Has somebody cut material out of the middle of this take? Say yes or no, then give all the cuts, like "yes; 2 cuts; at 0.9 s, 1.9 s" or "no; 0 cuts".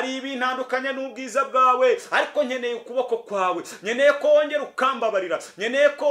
no; 0 cuts